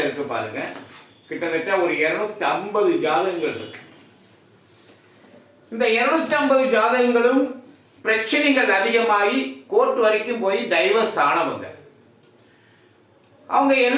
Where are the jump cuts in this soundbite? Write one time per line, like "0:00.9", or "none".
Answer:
none